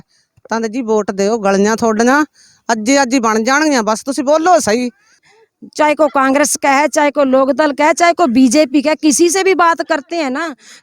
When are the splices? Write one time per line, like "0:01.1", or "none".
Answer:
0:05.3

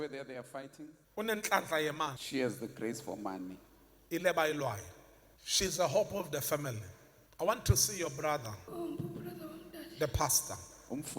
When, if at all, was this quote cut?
0:07.2

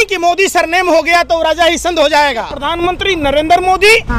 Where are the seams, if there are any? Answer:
0:02.6

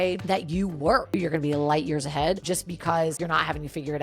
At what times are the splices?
0:01.1

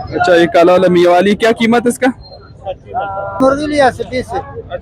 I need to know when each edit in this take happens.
0:03.4

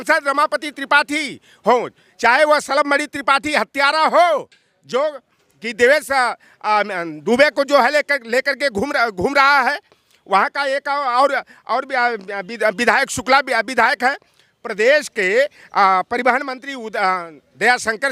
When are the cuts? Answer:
none

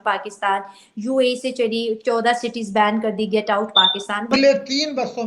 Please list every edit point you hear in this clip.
0:04.3

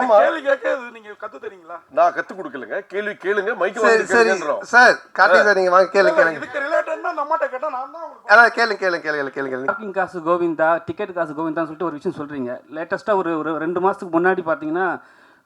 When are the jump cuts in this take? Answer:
0:09.7

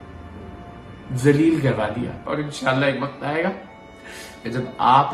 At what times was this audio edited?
0:02.2

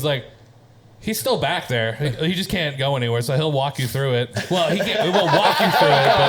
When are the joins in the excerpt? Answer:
none

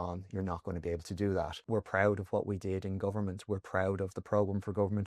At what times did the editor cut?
0:01.6

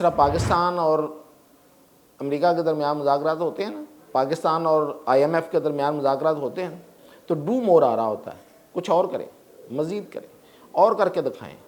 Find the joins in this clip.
none

